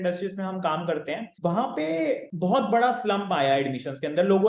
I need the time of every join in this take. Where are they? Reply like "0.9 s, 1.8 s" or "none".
1.3 s, 2.3 s